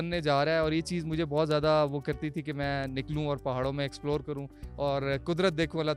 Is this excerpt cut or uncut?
uncut